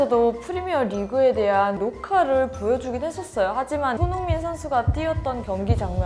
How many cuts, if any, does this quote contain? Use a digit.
0